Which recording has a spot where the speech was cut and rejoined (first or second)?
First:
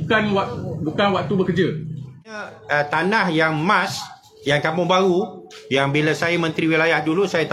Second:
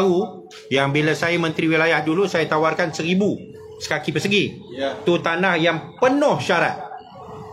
first